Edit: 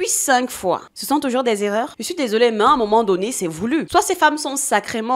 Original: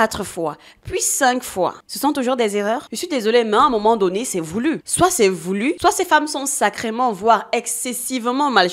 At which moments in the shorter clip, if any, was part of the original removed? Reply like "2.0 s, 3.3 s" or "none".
3.9 s

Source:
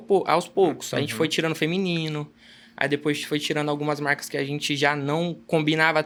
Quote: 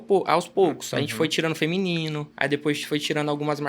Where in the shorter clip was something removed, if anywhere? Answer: 2.3 s

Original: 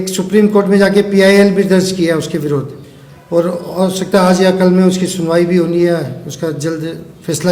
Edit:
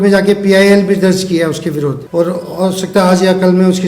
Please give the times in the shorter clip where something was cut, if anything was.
2.0 s

